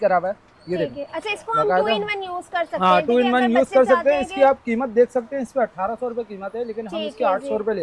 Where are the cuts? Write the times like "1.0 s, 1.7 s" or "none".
none